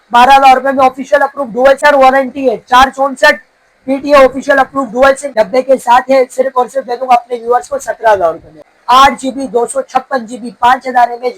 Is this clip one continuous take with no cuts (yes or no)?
no